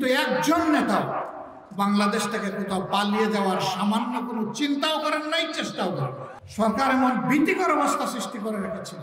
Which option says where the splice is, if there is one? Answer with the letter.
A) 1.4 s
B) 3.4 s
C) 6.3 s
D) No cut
C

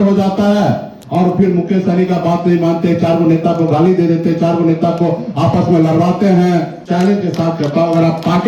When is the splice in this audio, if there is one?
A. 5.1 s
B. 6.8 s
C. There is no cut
B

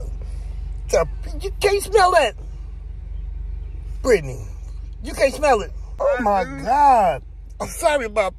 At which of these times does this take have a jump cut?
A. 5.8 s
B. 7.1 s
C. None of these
A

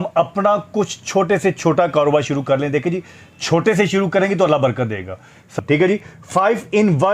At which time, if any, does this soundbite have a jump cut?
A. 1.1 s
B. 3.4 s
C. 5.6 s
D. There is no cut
C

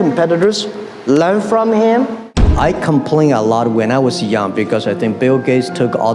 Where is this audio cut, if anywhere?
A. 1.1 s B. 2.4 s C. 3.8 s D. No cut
B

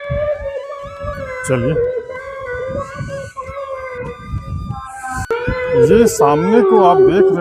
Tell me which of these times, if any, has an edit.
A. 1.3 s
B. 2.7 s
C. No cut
C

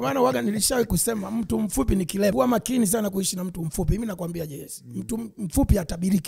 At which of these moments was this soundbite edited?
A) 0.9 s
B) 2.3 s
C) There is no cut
B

